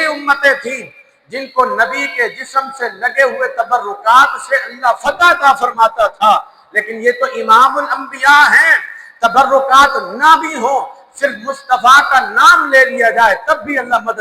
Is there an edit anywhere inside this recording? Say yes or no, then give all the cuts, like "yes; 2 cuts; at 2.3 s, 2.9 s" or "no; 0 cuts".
no; 0 cuts